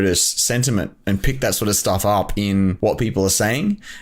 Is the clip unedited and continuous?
no; 1 cut; at 2.8 s

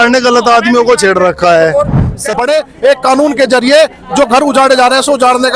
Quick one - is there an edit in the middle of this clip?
yes; 1 cut; at 2.3 s

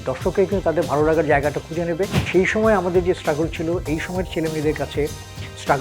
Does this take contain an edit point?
yes; 1 cut; at 2.3 s

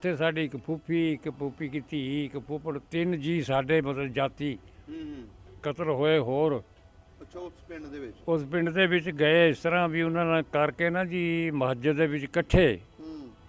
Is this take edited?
no; 0 cuts

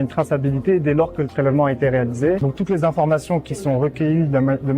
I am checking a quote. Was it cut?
yes; 1 cut; at 2.5 s

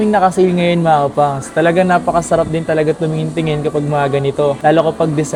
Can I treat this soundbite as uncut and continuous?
yes; 0 cuts

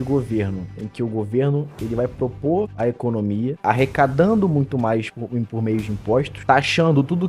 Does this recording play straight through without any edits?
yes; 0 cuts

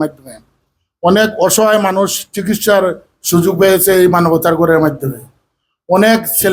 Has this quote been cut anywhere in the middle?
no; 0 cuts

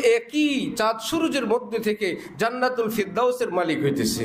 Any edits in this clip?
no; 0 cuts

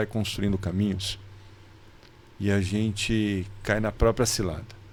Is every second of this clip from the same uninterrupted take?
yes; 0 cuts

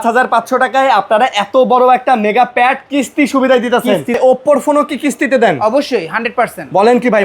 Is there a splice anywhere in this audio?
yes; 1 cut; at 4.2 s

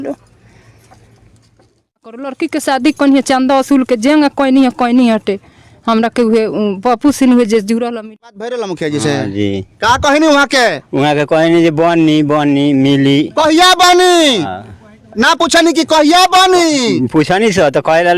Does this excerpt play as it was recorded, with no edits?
no; 2 cuts; at 2.3 s, 7.9 s

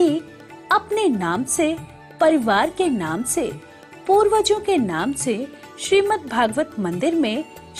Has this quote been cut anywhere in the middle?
no; 0 cuts

